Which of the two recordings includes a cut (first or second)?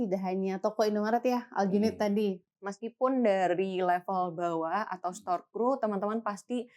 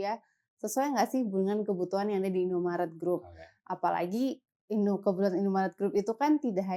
first